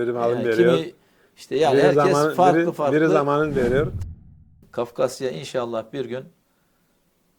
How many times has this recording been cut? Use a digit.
1